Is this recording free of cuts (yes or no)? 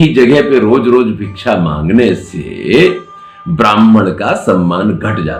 yes